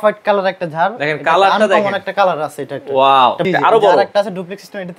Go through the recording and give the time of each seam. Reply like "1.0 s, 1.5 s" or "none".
3.5 s